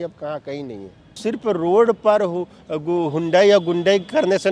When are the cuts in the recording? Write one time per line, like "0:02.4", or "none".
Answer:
0:01.2